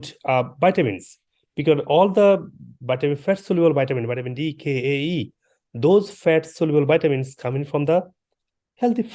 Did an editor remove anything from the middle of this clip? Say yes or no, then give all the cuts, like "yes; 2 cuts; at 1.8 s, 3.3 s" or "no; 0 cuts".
no; 0 cuts